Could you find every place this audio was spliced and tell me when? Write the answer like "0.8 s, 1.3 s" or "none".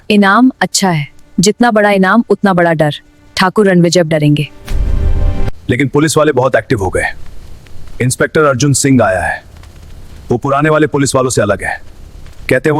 none